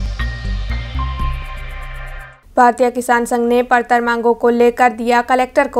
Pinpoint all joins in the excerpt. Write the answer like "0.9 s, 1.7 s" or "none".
2.2 s

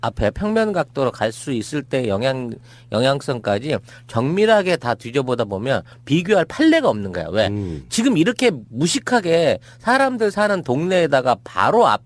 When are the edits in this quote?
none

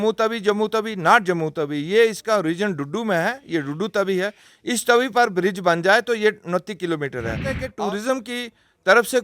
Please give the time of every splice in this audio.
7.6 s

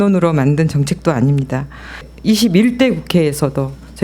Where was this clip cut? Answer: 2.0 s

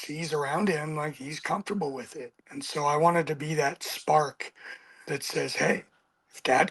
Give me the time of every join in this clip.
none

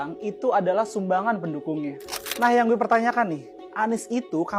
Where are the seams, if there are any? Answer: none

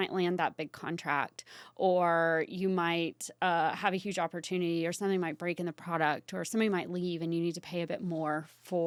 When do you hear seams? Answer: none

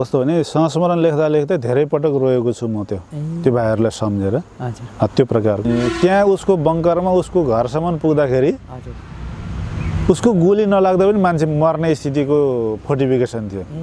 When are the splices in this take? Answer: 5.6 s

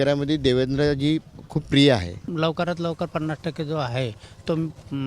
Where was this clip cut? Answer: 2.2 s

